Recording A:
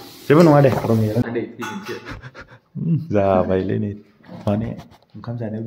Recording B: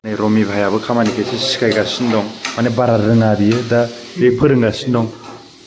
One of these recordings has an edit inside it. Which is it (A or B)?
A